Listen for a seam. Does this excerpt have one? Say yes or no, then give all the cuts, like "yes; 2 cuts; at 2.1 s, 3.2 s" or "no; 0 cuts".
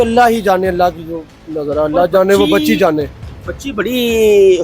no; 0 cuts